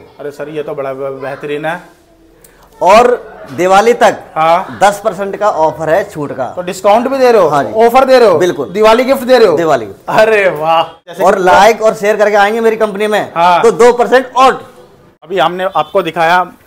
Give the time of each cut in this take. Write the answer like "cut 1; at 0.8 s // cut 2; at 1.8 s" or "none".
cut 1; at 11.1 s // cut 2; at 15.3 s